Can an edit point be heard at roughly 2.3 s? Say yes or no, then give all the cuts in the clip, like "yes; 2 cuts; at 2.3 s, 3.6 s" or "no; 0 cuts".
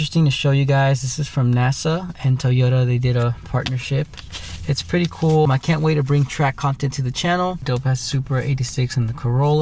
no; 2 cuts; at 5.5 s, 7.6 s